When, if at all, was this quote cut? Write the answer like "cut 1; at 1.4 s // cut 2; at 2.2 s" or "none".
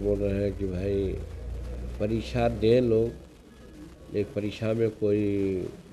none